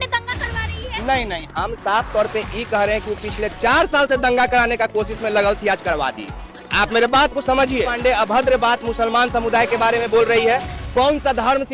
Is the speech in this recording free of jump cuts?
no; 1 cut; at 7.9 s

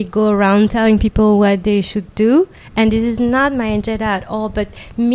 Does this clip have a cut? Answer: no; 0 cuts

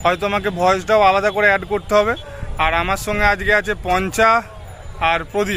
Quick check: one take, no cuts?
yes; 0 cuts

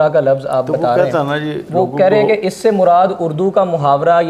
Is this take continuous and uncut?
yes; 0 cuts

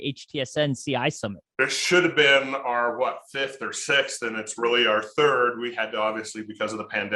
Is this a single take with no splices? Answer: no; 1 cut; at 1.4 s

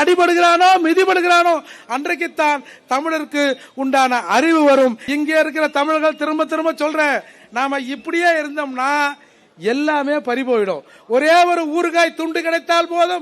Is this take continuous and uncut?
no; 1 cut; at 5.0 s

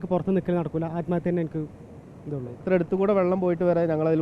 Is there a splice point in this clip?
yes; 1 cut; at 2.6 s

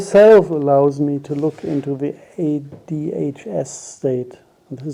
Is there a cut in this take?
no; 0 cuts

